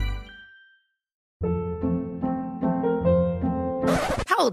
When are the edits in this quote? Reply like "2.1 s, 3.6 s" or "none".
1.1 s